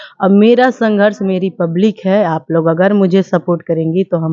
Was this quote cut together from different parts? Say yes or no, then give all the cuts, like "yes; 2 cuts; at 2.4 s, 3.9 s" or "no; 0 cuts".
no; 0 cuts